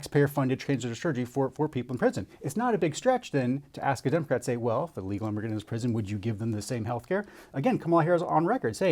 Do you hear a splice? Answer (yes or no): yes